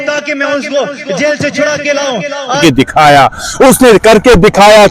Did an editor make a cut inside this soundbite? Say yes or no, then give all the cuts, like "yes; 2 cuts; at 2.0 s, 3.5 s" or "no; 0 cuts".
yes; 1 cut; at 2.6 s